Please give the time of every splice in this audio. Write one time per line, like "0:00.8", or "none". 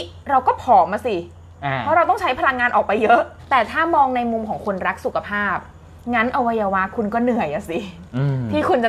0:03.4